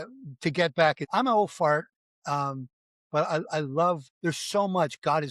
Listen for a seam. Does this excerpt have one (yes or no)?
yes